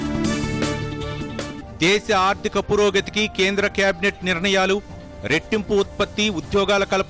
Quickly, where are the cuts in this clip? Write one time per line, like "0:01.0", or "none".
0:01.6